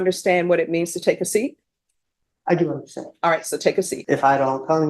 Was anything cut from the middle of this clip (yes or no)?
yes